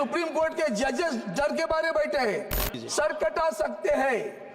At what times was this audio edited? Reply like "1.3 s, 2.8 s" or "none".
2.7 s